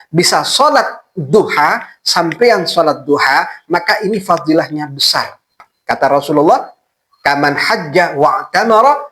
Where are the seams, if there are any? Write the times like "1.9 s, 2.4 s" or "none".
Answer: 5.7 s